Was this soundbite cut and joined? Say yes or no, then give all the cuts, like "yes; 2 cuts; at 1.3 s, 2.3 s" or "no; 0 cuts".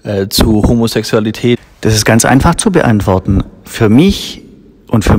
yes; 1 cut; at 1.6 s